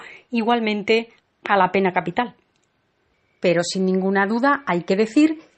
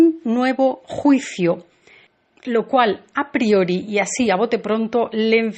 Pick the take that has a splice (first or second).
second